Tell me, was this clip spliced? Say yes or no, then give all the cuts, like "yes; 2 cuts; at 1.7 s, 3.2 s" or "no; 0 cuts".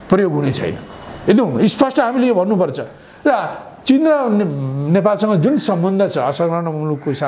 no; 0 cuts